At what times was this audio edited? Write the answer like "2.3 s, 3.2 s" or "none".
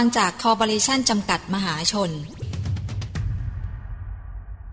2.4 s

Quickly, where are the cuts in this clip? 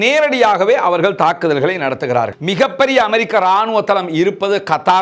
2.3 s

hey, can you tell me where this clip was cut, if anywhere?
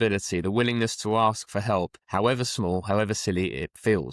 2.0 s

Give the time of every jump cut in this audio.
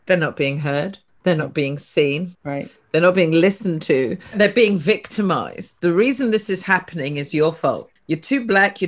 1.0 s, 2.4 s, 4.3 s, 7.9 s

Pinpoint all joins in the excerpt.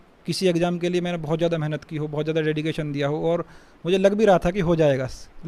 none

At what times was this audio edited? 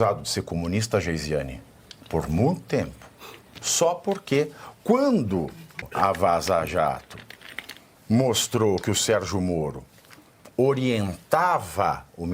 5.8 s

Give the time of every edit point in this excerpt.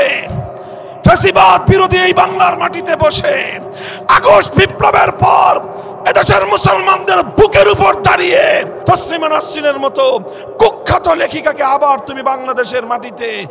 8.7 s

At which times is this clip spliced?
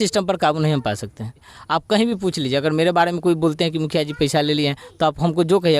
1.5 s

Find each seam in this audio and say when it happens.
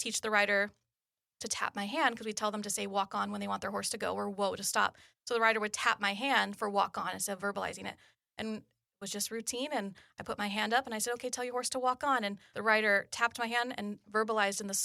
none

